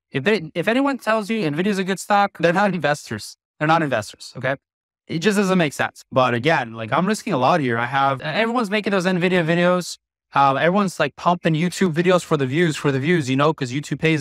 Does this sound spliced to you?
yes; 1 cut; at 8.2 s

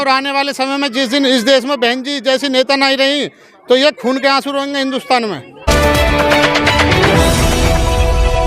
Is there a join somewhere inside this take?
yes; 1 cut; at 5.7 s

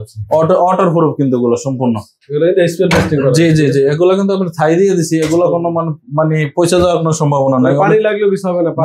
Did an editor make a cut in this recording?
no; 0 cuts

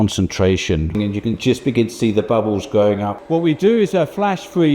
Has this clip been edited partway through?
yes; 2 cuts; at 1.0 s, 3.1 s

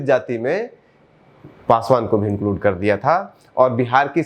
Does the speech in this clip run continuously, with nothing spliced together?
yes; 0 cuts

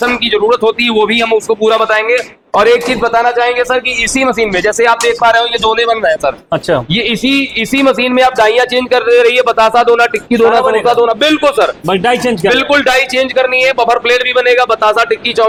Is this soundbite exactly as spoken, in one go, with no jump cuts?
yes; 0 cuts

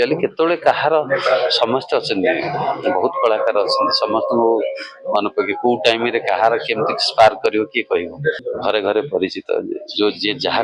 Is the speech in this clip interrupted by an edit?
yes; 1 cut; at 8.5 s

